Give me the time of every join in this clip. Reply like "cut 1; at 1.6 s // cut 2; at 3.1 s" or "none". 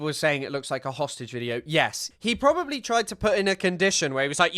cut 1; at 2.1 s